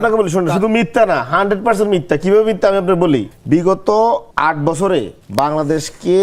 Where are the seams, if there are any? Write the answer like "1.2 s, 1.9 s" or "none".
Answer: 3.3 s, 4.3 s, 5.2 s